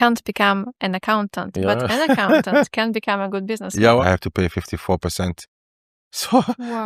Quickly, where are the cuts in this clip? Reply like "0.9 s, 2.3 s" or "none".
4.0 s